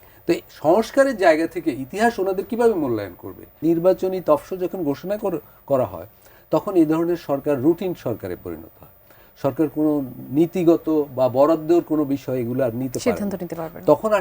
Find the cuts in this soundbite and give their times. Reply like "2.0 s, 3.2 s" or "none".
3.5 s